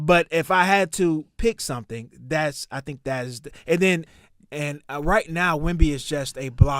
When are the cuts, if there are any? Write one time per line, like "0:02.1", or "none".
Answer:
0:04.1